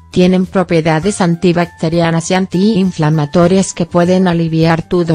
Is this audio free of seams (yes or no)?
yes